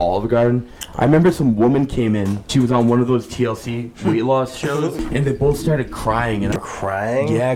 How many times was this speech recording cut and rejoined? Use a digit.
3